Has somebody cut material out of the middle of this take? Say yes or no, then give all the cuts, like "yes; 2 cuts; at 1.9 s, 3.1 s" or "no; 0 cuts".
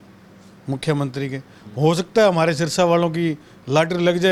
no; 0 cuts